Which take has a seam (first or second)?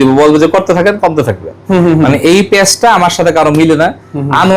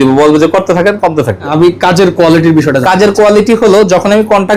second